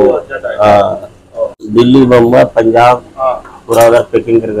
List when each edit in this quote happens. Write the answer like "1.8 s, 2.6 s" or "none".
1.6 s

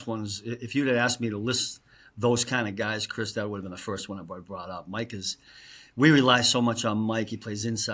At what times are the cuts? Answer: none

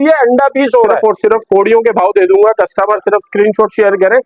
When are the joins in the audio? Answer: 0.9 s

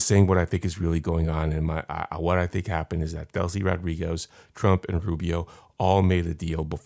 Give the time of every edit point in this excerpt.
none

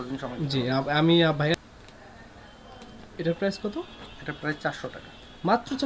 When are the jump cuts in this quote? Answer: 1.5 s

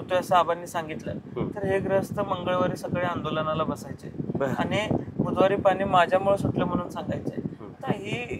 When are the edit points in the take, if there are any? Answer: none

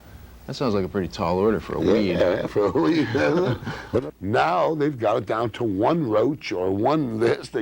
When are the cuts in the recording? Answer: 4.0 s

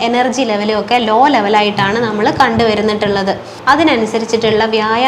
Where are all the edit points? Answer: 3.5 s

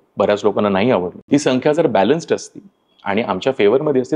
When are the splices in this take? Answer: 1.2 s

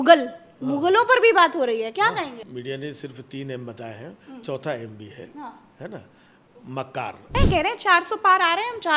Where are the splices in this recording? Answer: 2.4 s, 7.3 s

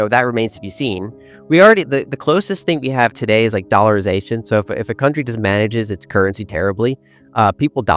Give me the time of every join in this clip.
none

